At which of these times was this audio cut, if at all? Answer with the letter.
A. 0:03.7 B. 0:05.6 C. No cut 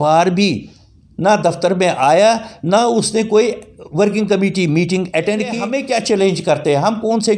B